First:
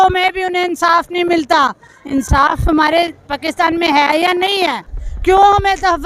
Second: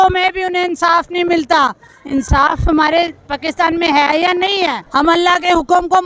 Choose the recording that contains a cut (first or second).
second